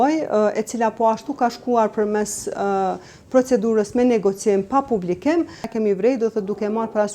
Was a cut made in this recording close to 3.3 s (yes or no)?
no